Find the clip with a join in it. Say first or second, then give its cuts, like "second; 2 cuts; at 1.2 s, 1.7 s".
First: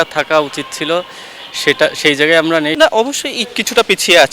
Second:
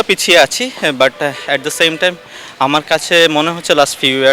first; 1 cut; at 2.7 s